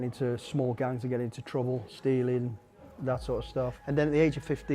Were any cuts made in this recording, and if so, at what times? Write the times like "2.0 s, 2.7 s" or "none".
1.9 s, 3.8 s